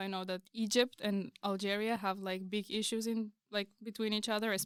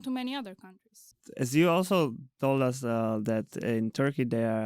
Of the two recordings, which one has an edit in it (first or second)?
second